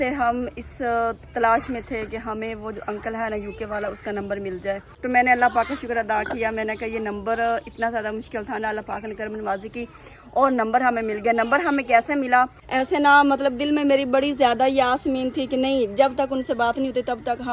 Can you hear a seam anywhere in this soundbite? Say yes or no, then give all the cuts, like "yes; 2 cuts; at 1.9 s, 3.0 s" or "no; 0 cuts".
yes; 2 cuts; at 4.9 s, 12.6 s